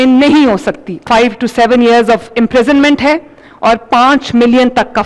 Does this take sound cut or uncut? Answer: cut